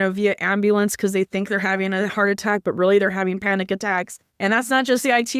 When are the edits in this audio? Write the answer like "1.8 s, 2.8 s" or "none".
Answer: 4.2 s